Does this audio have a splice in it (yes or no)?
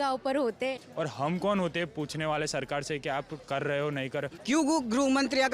yes